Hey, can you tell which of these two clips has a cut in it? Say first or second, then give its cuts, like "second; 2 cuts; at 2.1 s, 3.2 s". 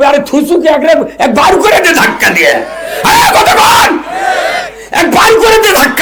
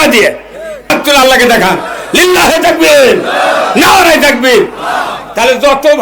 second; 1 cut; at 0.9 s